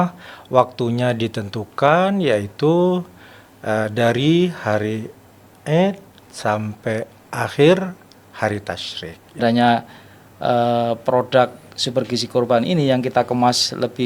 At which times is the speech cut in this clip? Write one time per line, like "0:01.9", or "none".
0:09.4